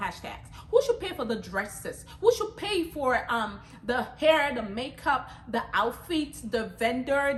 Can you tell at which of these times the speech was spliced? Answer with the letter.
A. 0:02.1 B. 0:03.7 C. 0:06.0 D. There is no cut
D